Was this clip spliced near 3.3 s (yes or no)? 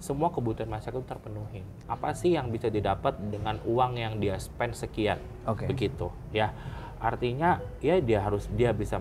no